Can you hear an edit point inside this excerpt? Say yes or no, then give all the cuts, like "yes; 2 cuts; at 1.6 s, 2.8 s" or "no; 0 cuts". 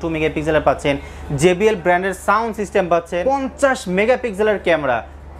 yes; 1 cut; at 3.1 s